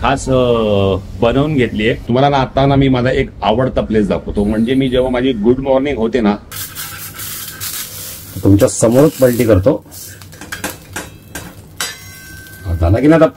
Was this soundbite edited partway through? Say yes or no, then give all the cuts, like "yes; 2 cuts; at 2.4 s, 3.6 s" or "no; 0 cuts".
yes; 2 cuts; at 2.0 s, 6.4 s